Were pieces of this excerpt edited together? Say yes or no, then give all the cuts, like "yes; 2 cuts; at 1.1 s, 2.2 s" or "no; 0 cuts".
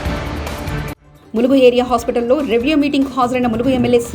yes; 1 cut; at 1.0 s